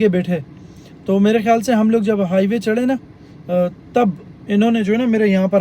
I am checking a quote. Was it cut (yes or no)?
no